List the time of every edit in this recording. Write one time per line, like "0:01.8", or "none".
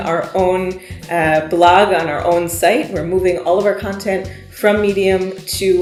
none